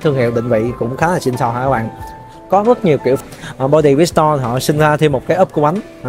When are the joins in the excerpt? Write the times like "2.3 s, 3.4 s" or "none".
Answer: 3.2 s